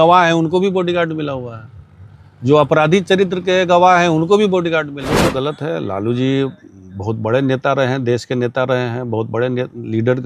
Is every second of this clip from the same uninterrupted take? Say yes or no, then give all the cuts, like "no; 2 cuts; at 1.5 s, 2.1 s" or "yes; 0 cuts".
no; 1 cut; at 5.2 s